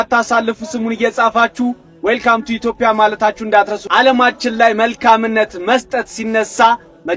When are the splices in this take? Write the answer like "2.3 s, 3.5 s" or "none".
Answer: 3.8 s

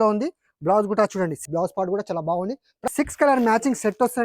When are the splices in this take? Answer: 1.4 s, 2.9 s

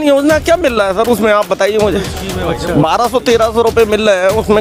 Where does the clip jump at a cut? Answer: none

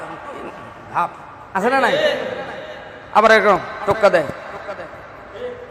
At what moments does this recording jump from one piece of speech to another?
none

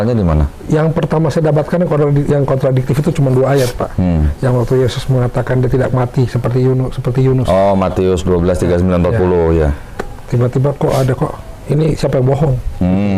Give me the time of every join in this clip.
none

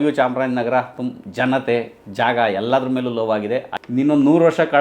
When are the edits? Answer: 3.7 s

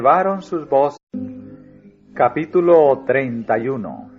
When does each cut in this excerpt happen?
none

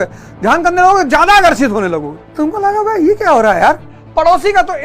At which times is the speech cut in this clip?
2.2 s, 3.9 s

